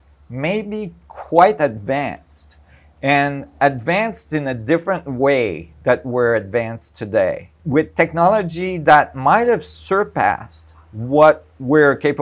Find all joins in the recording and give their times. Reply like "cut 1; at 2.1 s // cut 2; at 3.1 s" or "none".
cut 1; at 7.5 s